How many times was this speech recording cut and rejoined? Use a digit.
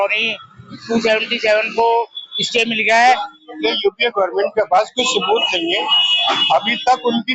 1